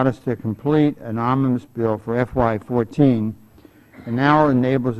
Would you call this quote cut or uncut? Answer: uncut